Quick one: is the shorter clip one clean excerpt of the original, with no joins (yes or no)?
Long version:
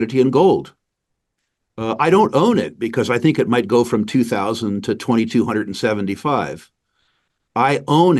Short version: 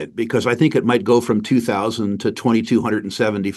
yes